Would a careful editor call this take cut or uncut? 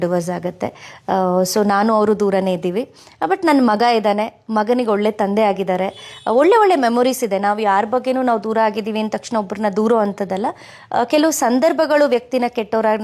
uncut